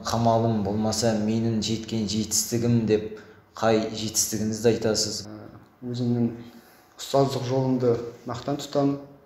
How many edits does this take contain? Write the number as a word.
one